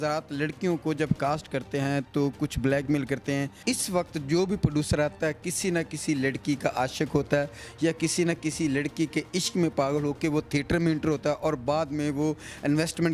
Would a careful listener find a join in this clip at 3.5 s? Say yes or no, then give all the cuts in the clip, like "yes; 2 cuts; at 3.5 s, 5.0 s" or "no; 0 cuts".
yes; 1 cut; at 3.5 s